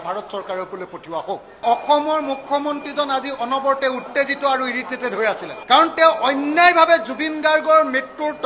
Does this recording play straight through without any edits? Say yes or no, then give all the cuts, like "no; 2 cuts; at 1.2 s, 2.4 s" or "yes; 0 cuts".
no; 2 cuts; at 1.6 s, 5.5 s